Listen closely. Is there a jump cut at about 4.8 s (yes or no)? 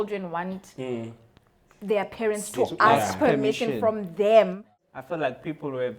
yes